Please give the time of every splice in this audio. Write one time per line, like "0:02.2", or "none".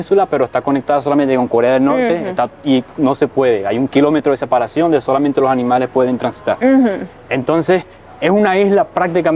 none